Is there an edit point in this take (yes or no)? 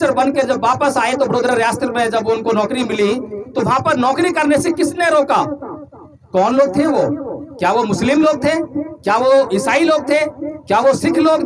no